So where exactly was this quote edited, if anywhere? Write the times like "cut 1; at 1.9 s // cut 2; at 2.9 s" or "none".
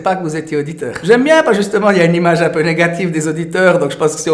cut 1; at 1.0 s